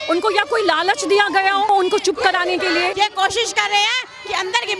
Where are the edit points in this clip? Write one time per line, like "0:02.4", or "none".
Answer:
0:01.7
0:02.9

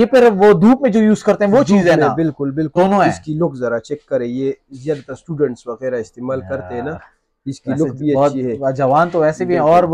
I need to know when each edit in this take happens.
0:02.7

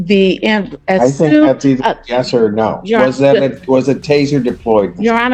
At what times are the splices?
none

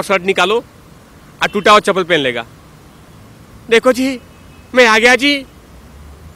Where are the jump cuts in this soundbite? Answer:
none

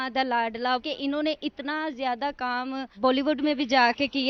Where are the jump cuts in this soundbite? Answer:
none

